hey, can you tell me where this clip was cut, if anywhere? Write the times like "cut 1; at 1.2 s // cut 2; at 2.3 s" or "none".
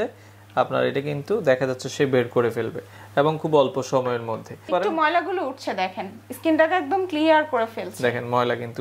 cut 1; at 4.6 s